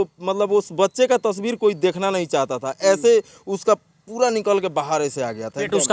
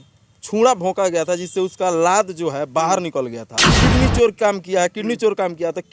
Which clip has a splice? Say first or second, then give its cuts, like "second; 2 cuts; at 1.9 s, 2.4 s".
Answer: second; 1 cut; at 3.7 s